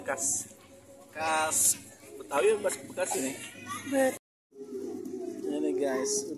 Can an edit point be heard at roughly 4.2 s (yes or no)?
yes